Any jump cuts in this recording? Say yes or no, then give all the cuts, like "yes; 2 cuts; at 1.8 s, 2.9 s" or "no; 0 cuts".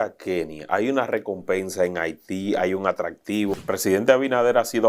yes; 1 cut; at 3.6 s